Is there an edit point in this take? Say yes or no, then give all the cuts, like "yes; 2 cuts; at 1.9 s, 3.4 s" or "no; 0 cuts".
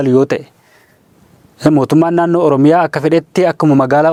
no; 0 cuts